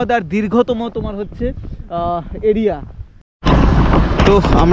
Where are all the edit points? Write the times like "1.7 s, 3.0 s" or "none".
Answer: 3.3 s